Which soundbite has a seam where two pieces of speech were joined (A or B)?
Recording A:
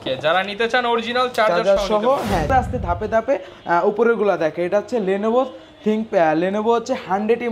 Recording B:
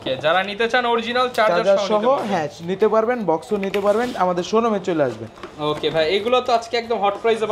A